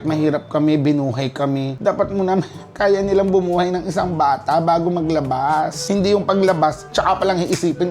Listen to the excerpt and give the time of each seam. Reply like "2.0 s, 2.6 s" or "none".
1.8 s